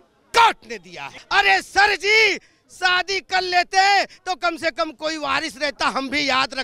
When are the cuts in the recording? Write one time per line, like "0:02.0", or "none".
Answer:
0:01.2